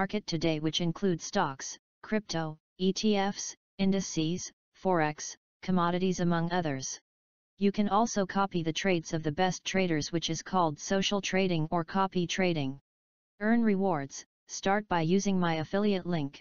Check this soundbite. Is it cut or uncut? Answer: uncut